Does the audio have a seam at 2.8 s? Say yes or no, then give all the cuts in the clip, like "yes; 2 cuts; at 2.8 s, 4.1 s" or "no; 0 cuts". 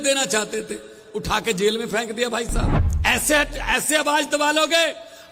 yes; 1 cut; at 2.8 s